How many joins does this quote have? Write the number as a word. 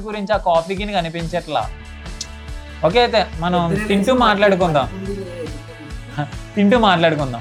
zero